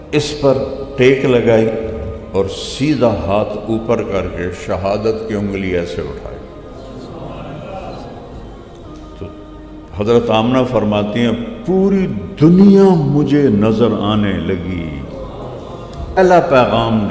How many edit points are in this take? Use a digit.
1